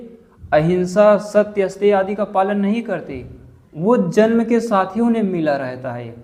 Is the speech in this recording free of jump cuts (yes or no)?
yes